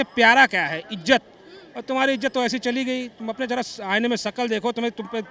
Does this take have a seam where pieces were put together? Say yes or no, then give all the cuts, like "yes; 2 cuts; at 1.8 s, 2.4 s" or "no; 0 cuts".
no; 0 cuts